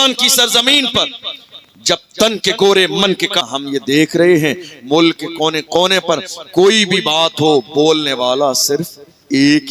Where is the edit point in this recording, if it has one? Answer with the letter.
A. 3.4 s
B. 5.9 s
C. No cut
A